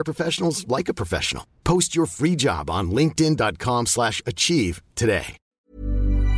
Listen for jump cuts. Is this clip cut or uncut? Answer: cut